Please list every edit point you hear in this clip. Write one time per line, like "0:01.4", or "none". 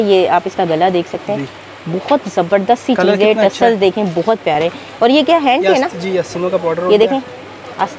none